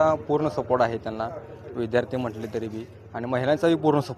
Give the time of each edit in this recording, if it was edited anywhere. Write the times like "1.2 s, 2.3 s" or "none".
none

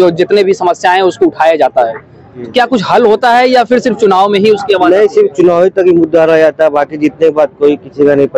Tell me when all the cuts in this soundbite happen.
none

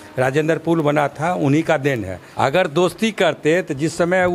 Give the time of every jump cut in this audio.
2.2 s

